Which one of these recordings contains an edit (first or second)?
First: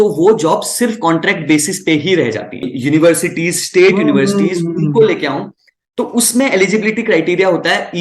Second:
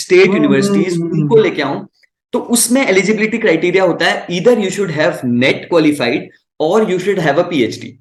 first